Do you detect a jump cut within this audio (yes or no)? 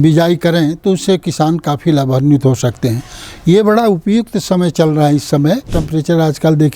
yes